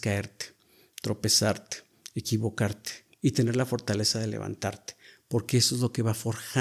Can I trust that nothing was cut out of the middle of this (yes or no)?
yes